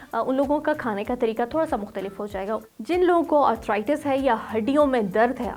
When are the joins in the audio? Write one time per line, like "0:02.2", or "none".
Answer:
0:02.6